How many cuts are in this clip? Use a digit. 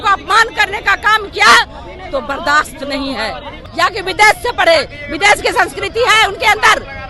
1